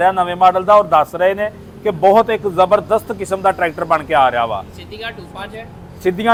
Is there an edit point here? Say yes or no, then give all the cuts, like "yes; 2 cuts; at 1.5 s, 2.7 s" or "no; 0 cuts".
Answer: no; 0 cuts